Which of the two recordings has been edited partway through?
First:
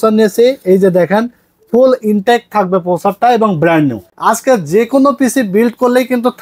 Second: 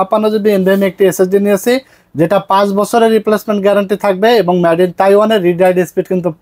first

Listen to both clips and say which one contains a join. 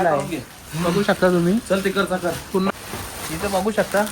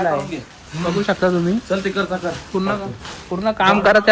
first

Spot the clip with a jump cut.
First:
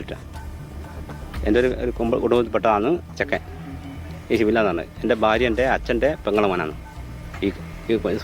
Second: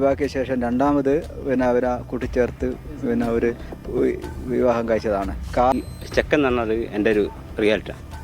second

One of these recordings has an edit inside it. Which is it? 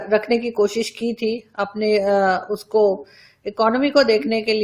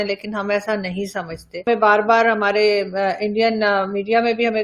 second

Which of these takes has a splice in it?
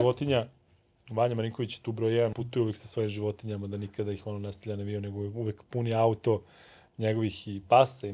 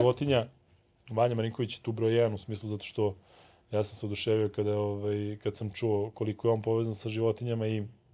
first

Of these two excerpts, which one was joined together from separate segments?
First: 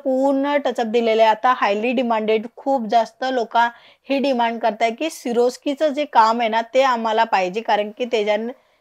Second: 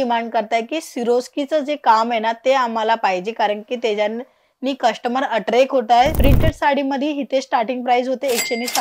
second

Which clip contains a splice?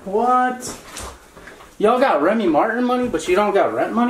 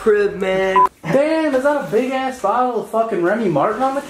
second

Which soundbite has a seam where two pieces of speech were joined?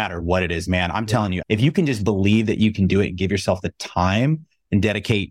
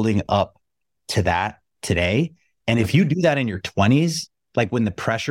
first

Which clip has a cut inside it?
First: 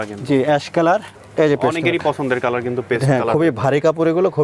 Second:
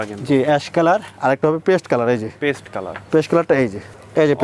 first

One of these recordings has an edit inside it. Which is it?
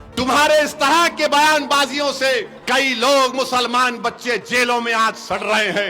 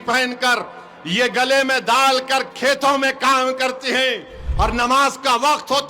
first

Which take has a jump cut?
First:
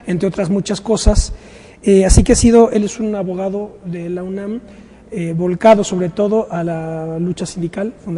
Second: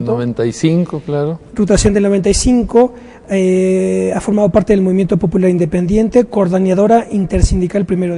second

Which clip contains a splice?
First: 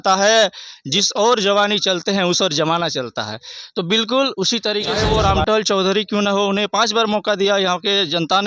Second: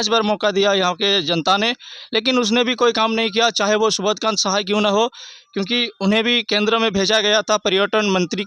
first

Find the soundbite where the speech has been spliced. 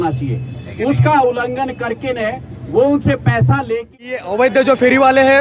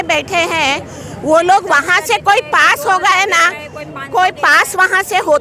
first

